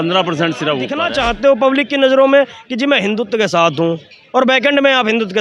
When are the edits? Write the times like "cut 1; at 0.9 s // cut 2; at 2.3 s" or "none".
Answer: cut 1; at 1.0 s